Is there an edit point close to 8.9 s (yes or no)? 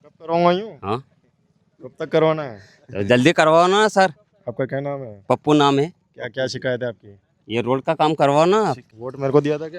yes